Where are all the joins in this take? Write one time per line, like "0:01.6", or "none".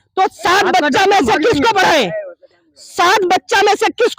none